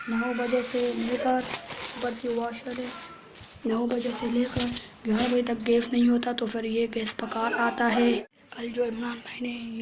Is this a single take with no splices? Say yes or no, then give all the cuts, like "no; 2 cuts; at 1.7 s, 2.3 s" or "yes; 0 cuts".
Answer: no; 1 cut; at 8.4 s